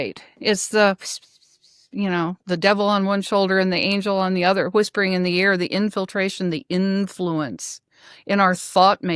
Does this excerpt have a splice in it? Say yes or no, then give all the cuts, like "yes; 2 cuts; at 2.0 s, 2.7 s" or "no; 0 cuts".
no; 0 cuts